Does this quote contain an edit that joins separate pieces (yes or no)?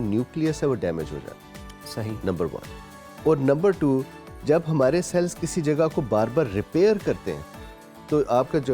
no